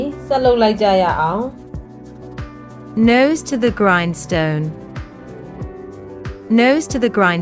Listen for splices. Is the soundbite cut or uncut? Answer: uncut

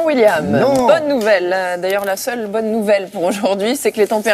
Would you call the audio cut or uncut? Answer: uncut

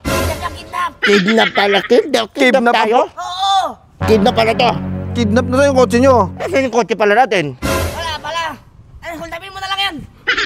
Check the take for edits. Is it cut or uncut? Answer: uncut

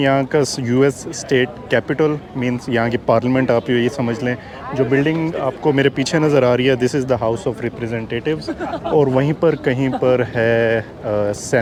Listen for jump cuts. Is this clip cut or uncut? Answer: uncut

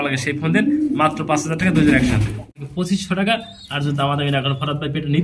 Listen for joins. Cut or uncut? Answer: cut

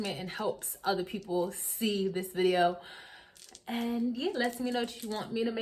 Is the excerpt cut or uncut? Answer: uncut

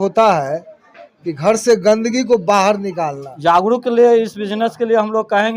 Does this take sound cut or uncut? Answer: cut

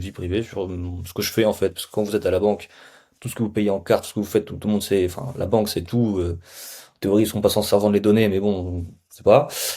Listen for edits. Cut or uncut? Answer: uncut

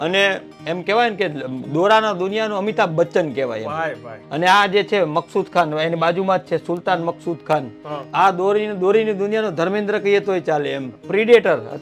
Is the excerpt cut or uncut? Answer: cut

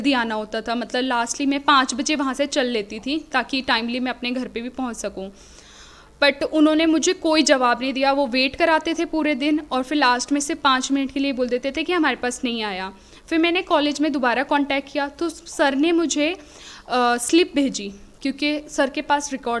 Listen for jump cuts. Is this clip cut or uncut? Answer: uncut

